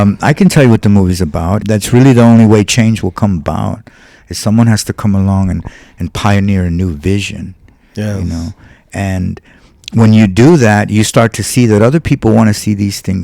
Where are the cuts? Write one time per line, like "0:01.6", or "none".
0:01.6